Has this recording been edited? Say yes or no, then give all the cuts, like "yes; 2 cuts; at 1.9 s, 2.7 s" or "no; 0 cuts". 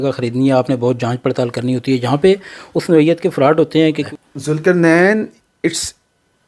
yes; 1 cut; at 4.0 s